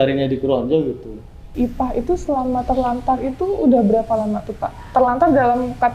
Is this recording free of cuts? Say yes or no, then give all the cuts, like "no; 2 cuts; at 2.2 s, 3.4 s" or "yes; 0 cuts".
no; 1 cut; at 1.5 s